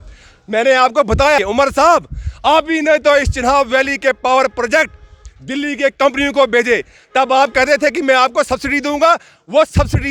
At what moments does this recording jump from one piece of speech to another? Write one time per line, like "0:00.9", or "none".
0:01.4